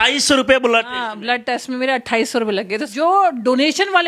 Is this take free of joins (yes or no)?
no